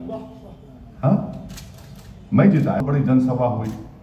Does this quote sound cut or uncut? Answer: cut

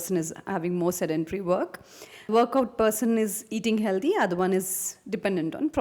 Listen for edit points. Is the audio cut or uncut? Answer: cut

